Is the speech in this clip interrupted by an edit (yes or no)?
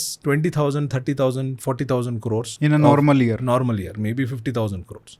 yes